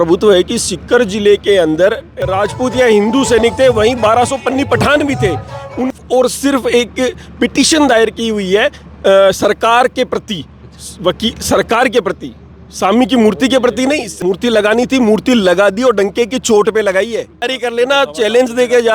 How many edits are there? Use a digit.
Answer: 4